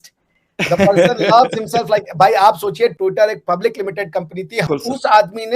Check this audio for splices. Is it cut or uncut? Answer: cut